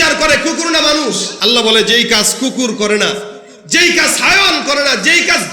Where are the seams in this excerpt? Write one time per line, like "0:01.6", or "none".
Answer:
0:01.3